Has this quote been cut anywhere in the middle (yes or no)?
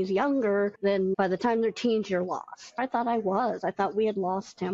yes